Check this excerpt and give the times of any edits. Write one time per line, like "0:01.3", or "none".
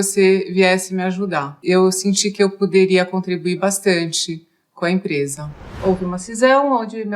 0:01.5
0:05.7

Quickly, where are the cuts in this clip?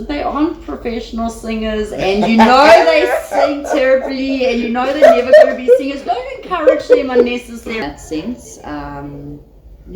0:07.8

